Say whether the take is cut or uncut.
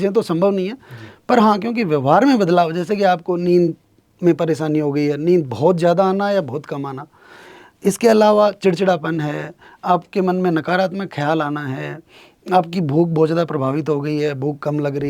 uncut